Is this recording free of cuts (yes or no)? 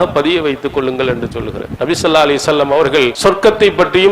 no